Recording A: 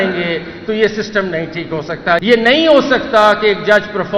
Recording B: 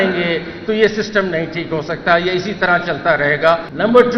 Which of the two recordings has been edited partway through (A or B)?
A